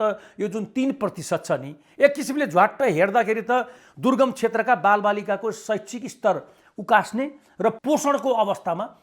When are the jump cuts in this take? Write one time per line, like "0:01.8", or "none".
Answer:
0:07.8